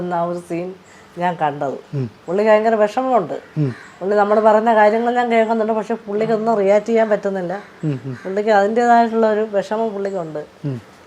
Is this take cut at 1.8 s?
no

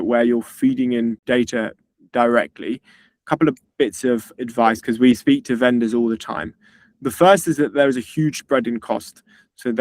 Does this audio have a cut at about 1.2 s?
yes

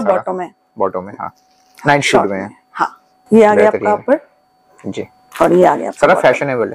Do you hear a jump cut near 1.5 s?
no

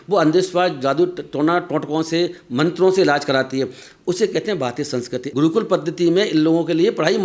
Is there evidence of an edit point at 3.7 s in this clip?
no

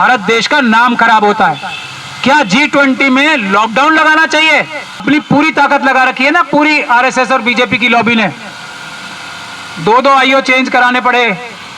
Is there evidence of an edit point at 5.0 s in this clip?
yes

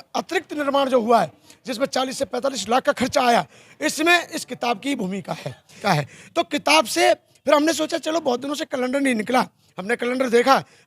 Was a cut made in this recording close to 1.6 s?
no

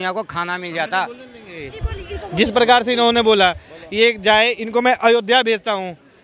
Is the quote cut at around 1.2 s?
no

